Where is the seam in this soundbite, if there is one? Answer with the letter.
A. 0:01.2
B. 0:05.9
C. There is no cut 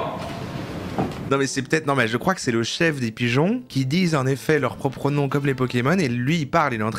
A